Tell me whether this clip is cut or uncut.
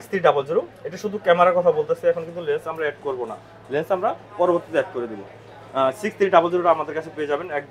uncut